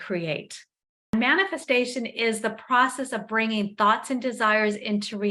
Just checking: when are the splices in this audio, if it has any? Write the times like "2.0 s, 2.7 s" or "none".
1.1 s

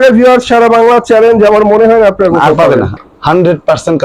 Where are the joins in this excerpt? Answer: 3.0 s

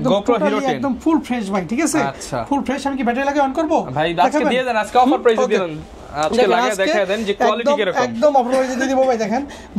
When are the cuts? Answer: none

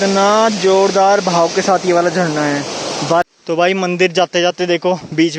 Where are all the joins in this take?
3.2 s

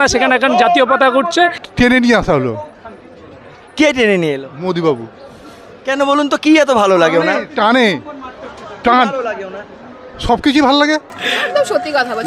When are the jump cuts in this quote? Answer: 1.6 s, 11.2 s

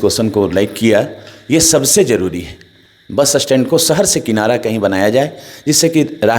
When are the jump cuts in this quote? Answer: none

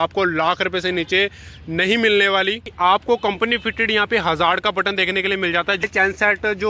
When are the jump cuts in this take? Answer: 2.6 s, 5.8 s

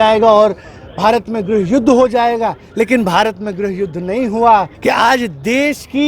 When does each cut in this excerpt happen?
4.7 s

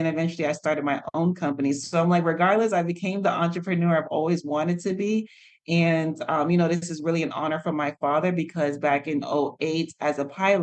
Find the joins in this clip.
none

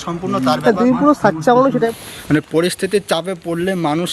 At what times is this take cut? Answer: 1.9 s

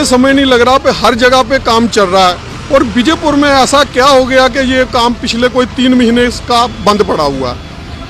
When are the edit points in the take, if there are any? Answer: none

